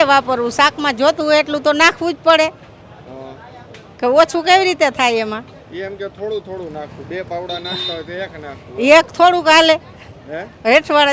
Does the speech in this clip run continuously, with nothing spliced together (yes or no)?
yes